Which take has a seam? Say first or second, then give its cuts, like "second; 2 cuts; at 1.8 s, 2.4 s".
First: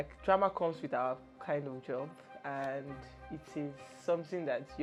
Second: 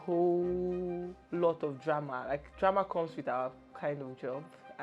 second; 1 cut; at 1.1 s